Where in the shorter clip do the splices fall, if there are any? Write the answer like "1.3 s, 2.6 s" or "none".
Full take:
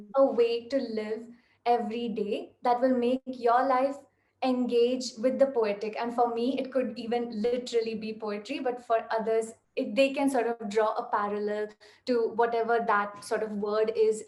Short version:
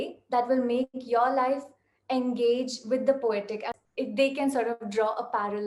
3.7 s